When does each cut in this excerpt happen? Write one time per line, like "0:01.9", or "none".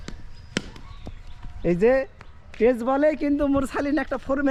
none